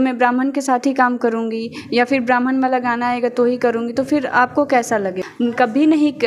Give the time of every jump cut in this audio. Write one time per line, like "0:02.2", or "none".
0:05.2